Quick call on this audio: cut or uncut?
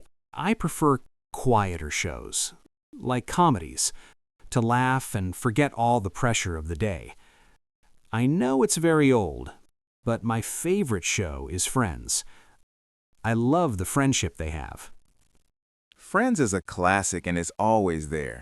cut